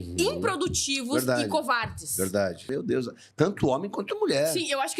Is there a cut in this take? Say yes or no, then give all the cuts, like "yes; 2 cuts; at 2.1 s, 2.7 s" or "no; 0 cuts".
yes; 1 cut; at 2.6 s